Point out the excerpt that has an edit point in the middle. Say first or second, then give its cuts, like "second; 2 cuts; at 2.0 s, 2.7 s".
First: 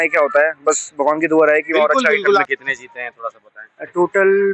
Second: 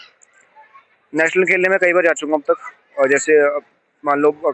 first; 1 cut; at 2.4 s